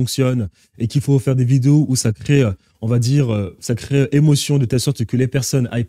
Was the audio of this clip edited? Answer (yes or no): no